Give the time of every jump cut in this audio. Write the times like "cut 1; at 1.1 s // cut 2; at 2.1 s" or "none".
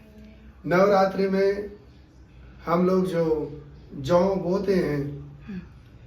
none